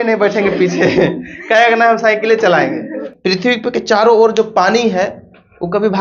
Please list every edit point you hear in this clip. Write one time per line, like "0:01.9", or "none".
0:03.1